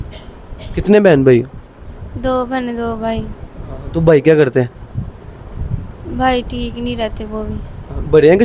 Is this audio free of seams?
yes; 0 cuts

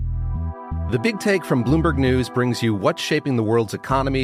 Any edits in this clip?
yes; 1 cut; at 0.9 s

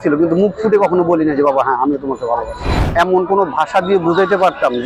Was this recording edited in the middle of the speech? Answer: yes; 1 cut; at 2.7 s

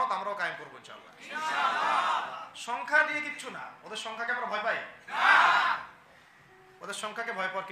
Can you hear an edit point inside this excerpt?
no; 0 cuts

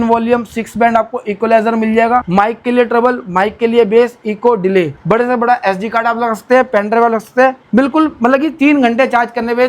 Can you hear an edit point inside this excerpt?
yes; 3 cuts; at 2.3 s, 5.0 s, 7.6 s

